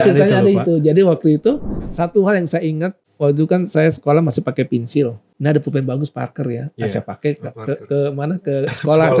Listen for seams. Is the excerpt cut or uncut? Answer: cut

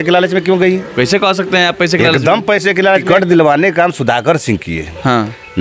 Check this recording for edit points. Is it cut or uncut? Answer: cut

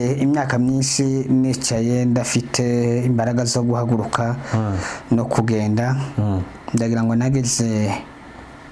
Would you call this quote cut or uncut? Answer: uncut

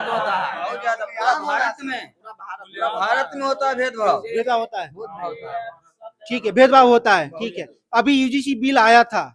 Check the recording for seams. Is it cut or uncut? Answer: uncut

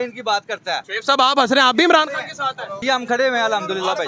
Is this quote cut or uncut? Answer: cut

